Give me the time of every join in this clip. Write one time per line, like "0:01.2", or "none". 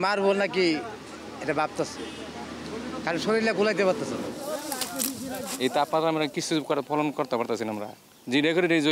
none